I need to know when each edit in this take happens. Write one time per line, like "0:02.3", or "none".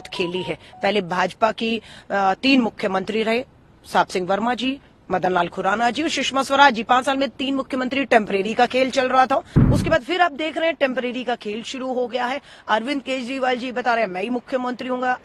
0:09.6